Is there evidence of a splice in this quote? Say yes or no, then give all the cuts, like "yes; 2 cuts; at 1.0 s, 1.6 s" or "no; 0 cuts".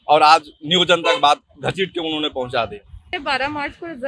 yes; 1 cut; at 3.1 s